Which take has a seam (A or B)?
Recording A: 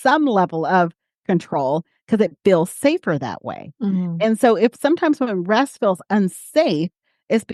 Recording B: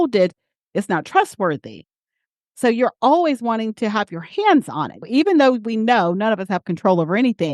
B